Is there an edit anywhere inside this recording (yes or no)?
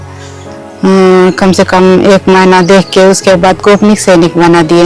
no